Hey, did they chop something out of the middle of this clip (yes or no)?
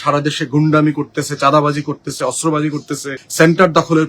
yes